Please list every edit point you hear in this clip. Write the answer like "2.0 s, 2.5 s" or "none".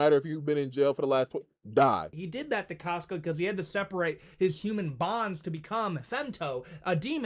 2.1 s